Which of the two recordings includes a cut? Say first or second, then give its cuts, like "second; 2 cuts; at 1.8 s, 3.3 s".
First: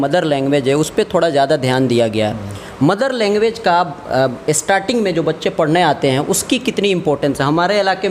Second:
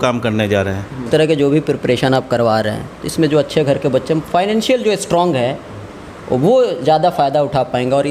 second; 1 cut; at 1.1 s